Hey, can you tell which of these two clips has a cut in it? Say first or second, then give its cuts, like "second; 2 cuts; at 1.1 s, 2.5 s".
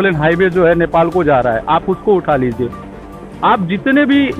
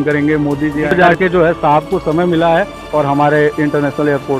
second; 1 cut; at 0.9 s